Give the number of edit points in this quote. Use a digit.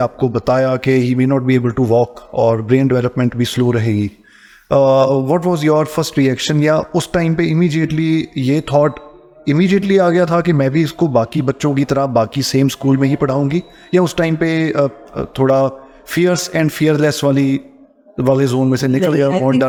0